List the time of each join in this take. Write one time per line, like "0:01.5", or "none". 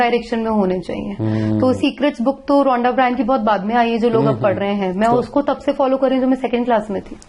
none